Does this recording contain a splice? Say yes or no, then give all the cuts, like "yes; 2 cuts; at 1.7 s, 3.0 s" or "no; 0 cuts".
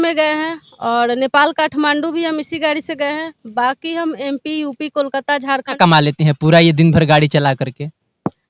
yes; 1 cut; at 5.7 s